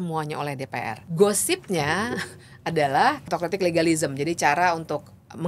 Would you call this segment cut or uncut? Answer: cut